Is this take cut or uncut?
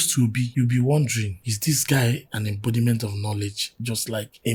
uncut